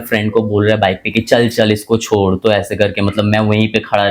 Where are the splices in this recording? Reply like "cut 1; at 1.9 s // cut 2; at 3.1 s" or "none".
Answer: none